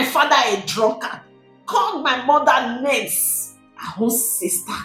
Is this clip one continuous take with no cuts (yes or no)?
yes